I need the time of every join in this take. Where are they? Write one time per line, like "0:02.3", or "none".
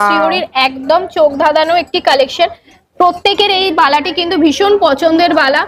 none